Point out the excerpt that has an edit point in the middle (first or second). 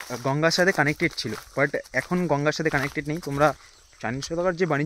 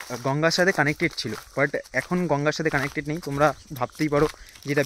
first